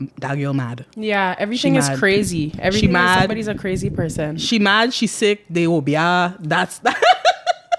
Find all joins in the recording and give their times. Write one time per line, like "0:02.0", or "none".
none